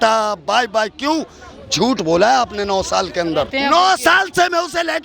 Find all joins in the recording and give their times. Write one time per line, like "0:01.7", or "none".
0:03.5